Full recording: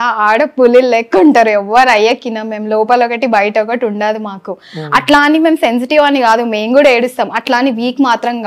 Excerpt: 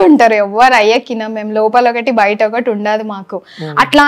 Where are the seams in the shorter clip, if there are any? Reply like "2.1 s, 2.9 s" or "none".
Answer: none